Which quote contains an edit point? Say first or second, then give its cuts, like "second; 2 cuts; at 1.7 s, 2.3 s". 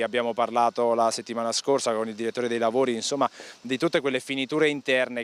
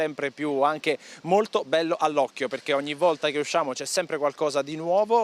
second; 1 cut; at 4.2 s